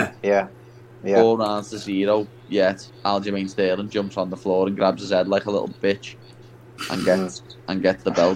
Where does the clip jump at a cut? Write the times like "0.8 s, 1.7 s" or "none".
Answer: none